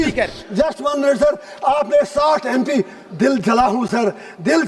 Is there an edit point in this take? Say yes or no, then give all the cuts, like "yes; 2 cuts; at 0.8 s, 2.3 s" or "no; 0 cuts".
no; 0 cuts